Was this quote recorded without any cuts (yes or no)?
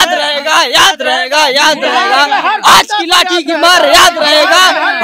yes